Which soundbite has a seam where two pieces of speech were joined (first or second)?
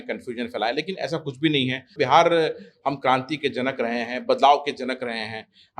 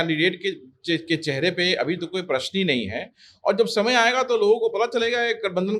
first